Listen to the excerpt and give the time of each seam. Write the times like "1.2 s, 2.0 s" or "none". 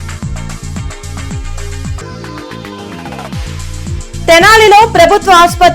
4.2 s